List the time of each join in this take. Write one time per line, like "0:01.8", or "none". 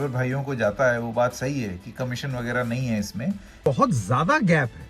0:03.6